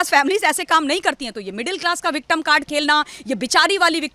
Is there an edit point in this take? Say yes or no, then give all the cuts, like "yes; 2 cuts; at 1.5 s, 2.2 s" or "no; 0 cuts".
no; 0 cuts